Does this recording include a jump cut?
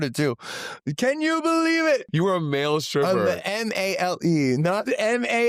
yes; 1 cut; at 2.1 s

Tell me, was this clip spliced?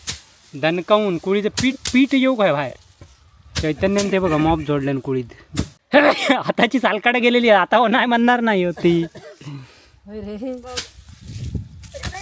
no; 0 cuts

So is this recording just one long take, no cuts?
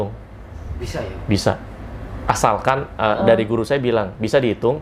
yes; 0 cuts

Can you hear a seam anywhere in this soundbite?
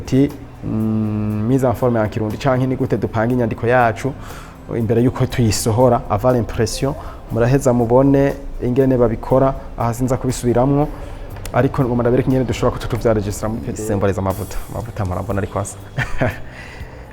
yes; 1 cut; at 13.7 s

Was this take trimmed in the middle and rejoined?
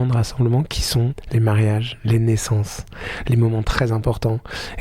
yes; 1 cut; at 1.1 s

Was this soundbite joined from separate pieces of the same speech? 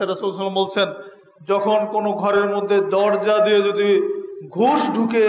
no; 0 cuts

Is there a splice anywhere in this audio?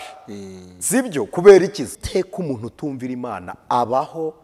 yes; 1 cut; at 2.0 s

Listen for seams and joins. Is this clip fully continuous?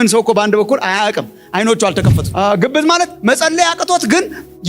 no; 1 cut; at 2.3 s

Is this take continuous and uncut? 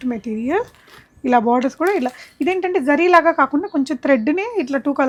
yes; 0 cuts

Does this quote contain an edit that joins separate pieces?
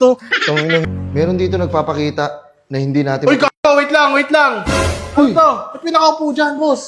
yes; 1 cut; at 1.0 s

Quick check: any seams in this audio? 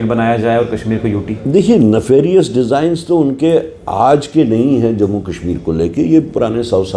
no; 0 cuts

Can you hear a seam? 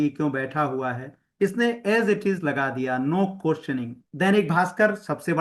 yes; 1 cut; at 4.0 s

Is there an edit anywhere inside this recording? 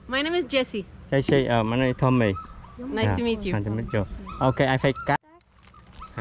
yes; 1 cut; at 5.2 s

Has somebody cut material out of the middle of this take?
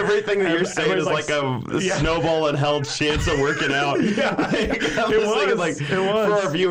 no; 0 cuts

